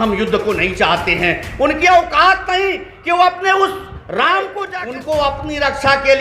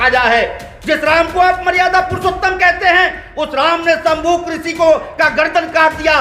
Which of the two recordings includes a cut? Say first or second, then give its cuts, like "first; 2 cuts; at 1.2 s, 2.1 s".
first; 1 cut; at 4.6 s